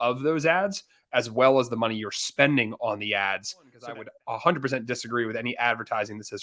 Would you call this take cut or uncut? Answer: cut